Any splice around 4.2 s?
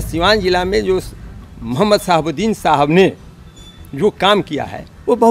no; 0 cuts

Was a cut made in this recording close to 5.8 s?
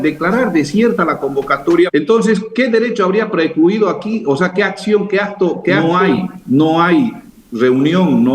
yes; 2 cuts; at 1.9 s, 5.8 s

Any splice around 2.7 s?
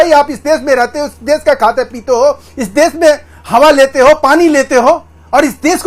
no; 0 cuts

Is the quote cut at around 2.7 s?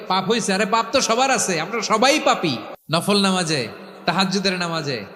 yes; 1 cut; at 2.7 s

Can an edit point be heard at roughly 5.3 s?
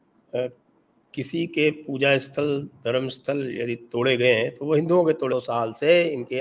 yes; 1 cut; at 5.3 s

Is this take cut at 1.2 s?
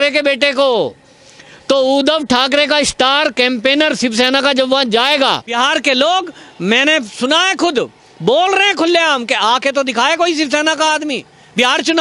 no; 0 cuts

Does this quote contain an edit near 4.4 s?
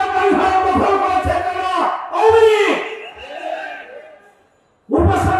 no; 0 cuts

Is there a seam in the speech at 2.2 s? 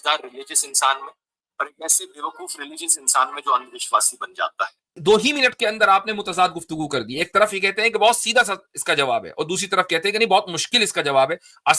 no; 1 cut; at 4.9 s

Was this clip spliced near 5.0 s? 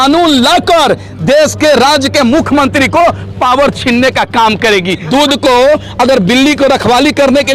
yes; 1 cut; at 5.0 s

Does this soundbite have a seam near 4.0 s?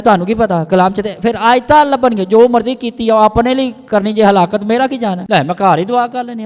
no; 1 cut; at 5.2 s

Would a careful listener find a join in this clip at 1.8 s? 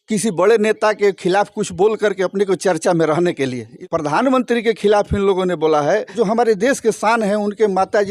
no; 2 cuts; at 3.8 s, 6.1 s

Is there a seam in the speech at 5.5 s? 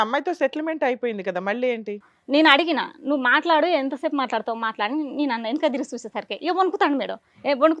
no; 1 cut; at 2.1 s

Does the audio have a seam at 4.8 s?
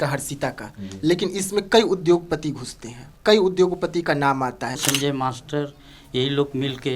yes; 1 cut; at 4.8 s

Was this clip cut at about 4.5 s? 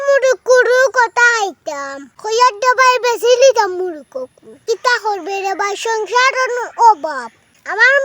yes; 2 cuts; at 2.0 s, 4.5 s

